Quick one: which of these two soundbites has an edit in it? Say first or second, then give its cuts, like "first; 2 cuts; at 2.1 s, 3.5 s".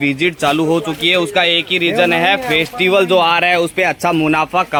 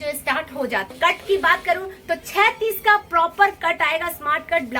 second; 1 cut; at 0.9 s